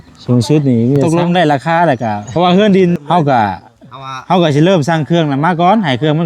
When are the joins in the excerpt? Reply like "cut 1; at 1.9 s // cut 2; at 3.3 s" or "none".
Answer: cut 1; at 1.0 s // cut 2; at 2.2 s // cut 3; at 3.0 s